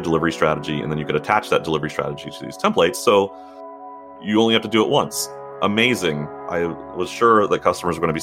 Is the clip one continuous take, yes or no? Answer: no